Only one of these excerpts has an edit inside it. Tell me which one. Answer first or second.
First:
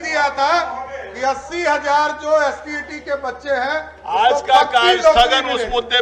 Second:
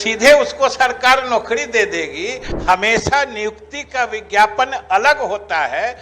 second